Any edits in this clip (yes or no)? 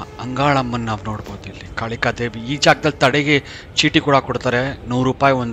no